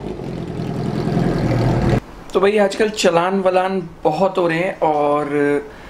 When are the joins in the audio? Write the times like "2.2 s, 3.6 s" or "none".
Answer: 2.0 s